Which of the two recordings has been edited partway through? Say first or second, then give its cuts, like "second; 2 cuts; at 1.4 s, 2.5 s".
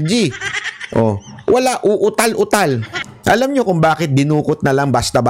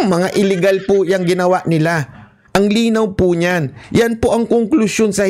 first; 1 cut; at 3.0 s